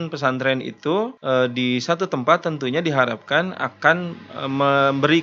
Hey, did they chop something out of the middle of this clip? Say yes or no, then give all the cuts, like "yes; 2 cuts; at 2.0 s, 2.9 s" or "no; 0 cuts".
yes; 1 cut; at 1.2 s